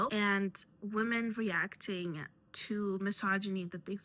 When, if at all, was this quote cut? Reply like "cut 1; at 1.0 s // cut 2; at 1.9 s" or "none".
none